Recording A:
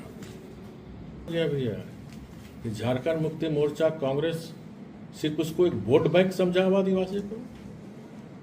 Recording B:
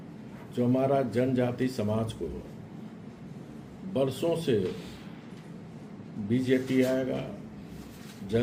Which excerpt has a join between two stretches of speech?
A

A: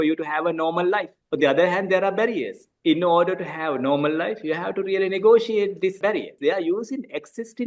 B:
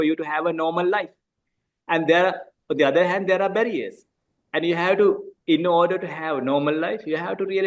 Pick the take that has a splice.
A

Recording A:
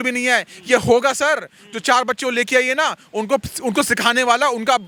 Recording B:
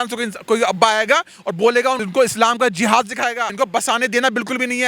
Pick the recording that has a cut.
B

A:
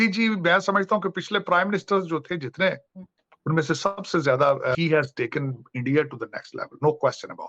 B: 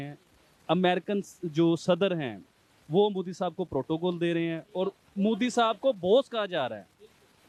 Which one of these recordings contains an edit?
A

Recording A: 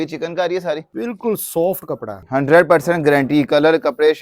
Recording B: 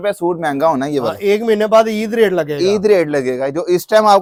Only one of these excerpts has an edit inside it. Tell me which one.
A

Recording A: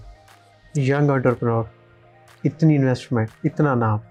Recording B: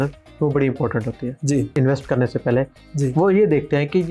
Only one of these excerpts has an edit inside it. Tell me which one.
B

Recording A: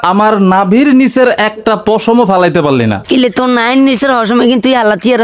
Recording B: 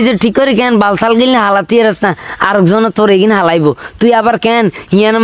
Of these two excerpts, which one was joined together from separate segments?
A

